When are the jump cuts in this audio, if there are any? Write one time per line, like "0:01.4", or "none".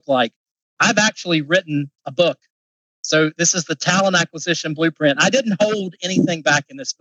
none